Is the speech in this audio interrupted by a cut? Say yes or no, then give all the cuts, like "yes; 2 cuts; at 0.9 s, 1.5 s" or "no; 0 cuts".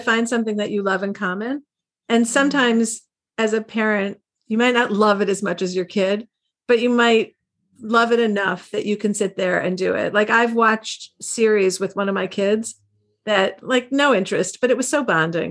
no; 0 cuts